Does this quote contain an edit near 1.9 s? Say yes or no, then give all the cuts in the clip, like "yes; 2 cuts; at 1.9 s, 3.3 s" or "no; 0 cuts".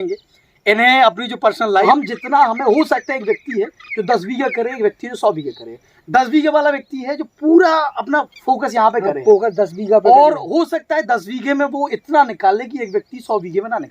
yes; 1 cut; at 1.9 s